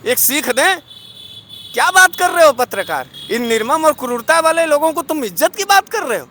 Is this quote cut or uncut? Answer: uncut